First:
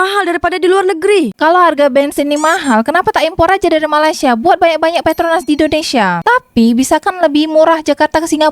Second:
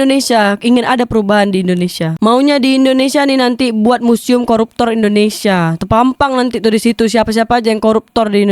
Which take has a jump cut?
first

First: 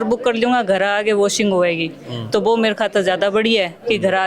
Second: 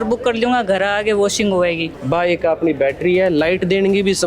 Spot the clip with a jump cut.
second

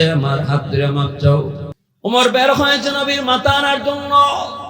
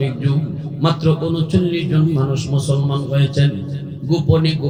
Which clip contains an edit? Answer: first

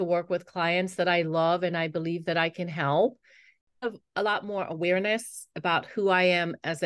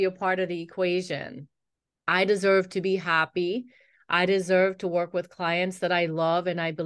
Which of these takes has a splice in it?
first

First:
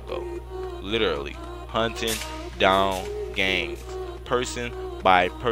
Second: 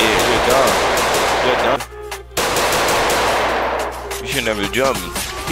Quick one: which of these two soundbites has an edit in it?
second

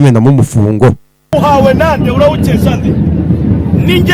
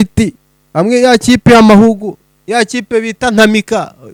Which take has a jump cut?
first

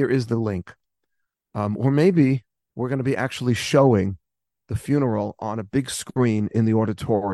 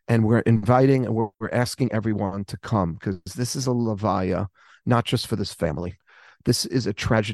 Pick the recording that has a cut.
second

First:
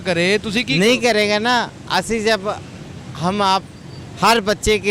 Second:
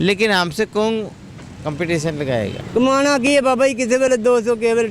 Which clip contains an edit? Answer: second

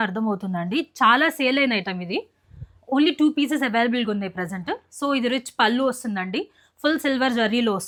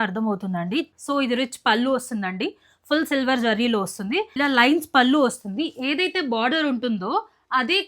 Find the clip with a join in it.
second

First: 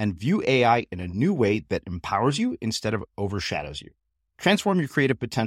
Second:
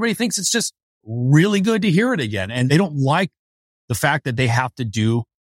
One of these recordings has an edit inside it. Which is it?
second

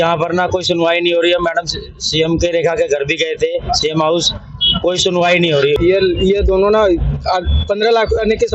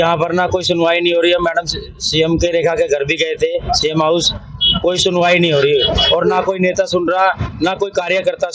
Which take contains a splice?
first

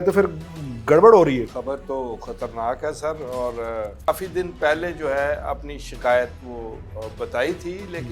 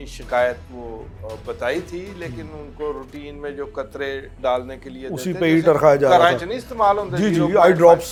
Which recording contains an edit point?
first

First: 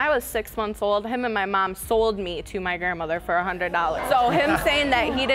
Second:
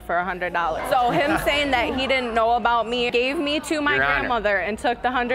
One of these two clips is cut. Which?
second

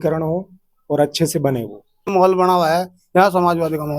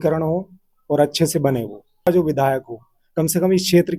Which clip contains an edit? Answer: first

